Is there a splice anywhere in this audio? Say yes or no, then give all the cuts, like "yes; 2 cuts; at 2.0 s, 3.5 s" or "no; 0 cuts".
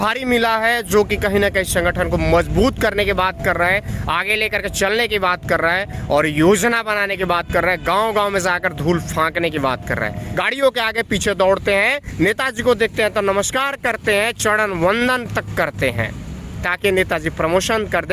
yes; 1 cut; at 10.2 s